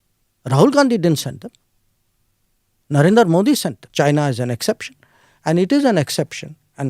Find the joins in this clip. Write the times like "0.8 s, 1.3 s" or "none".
3.8 s